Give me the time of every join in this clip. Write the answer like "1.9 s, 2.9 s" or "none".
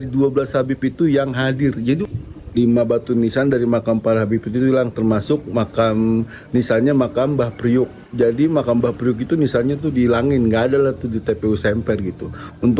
2.0 s